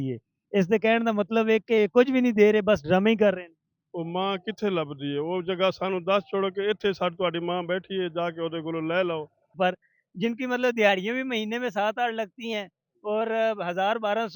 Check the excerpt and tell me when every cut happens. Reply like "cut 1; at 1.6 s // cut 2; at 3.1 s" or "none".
cut 1; at 9.5 s